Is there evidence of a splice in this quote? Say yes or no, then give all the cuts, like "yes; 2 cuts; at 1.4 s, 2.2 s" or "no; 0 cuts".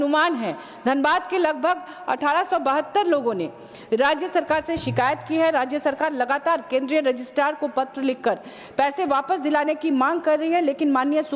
no; 0 cuts